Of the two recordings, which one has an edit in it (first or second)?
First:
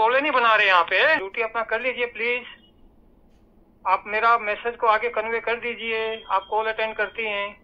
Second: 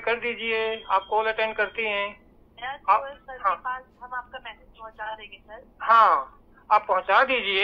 first